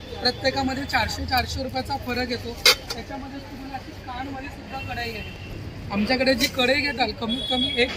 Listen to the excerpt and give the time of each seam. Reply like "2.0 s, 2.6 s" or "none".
none